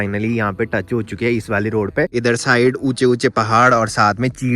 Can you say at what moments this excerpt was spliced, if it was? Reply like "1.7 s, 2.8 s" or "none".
2.1 s